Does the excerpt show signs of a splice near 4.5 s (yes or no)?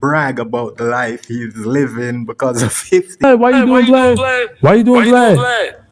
no